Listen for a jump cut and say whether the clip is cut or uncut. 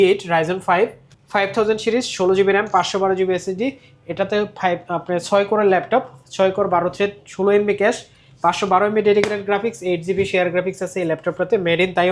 uncut